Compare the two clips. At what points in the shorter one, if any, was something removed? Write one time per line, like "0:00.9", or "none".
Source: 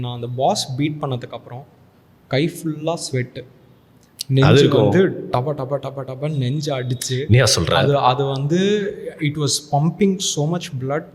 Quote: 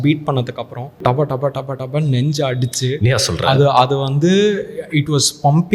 0:00.9

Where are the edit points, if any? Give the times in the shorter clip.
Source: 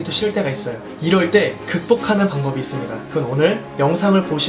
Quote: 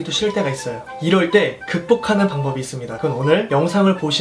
0:03.3

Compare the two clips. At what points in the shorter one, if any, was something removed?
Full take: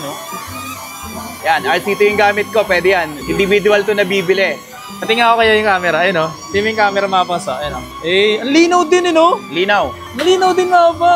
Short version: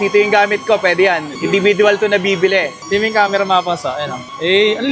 0:02.8

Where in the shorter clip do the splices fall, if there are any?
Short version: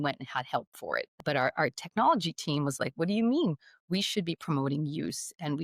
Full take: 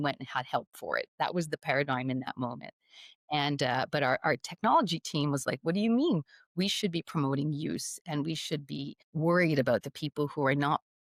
0:01.2

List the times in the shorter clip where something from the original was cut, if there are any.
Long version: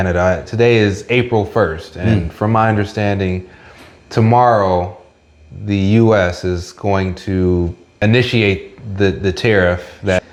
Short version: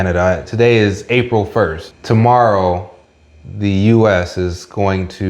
0:01.9

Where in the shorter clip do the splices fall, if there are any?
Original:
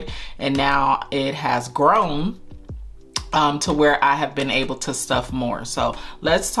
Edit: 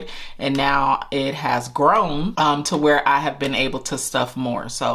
0:02.3

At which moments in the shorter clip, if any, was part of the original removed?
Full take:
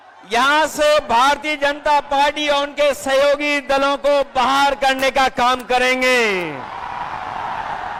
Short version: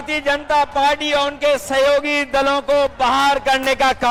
none

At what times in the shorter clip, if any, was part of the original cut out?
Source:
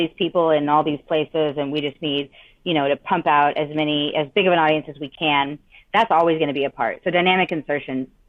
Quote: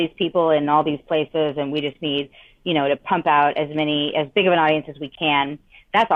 none

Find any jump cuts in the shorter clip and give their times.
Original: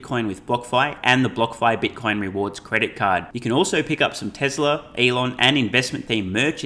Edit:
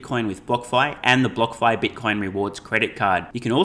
none

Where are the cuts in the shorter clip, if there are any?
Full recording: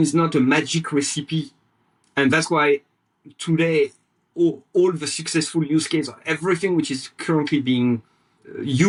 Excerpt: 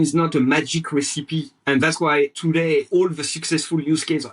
0:01.5
0:02.8

